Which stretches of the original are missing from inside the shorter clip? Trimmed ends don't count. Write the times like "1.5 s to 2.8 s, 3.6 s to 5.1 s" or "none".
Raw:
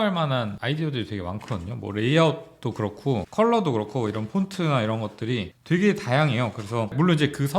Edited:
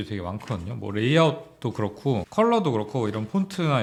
none